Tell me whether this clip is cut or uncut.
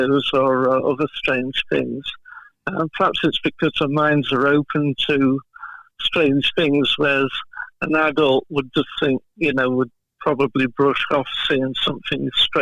uncut